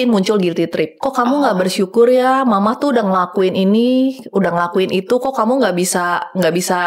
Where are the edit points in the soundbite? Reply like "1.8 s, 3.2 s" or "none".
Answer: none